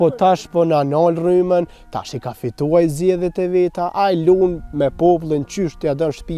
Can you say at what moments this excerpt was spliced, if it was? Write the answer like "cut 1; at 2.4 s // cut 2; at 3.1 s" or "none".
none